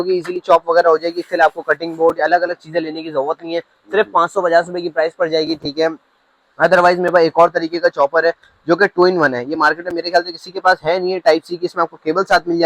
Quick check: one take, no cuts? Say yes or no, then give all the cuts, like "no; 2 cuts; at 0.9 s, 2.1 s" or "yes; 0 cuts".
yes; 0 cuts